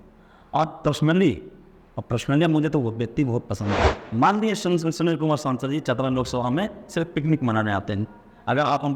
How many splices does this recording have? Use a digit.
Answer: 1